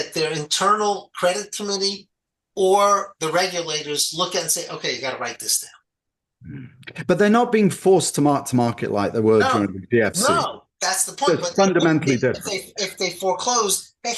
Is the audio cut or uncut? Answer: uncut